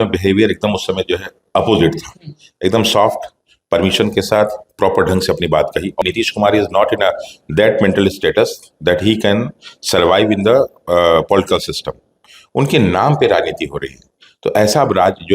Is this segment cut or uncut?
cut